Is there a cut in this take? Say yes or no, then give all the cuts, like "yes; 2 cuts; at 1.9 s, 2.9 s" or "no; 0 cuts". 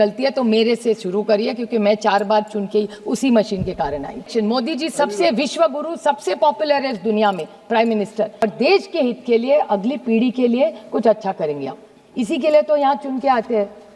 yes; 2 cuts; at 4.3 s, 8.4 s